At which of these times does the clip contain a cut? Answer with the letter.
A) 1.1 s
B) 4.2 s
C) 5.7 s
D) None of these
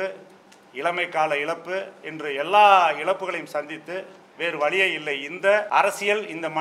C